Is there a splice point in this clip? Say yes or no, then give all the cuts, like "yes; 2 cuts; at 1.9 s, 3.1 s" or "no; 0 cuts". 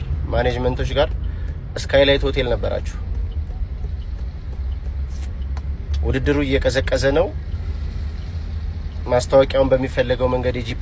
no; 0 cuts